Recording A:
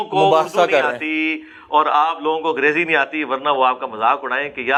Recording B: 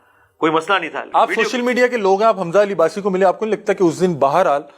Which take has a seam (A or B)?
B